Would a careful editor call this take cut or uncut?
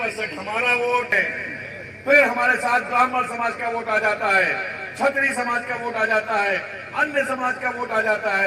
cut